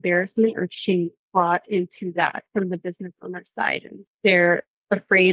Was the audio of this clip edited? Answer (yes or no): yes